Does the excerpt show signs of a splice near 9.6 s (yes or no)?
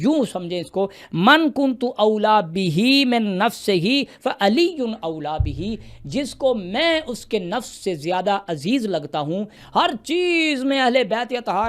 yes